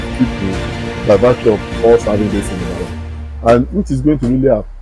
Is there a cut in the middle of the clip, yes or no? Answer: no